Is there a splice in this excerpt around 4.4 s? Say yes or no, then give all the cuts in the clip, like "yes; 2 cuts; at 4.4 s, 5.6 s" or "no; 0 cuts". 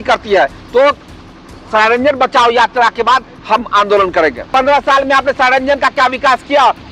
yes; 1 cut; at 4.4 s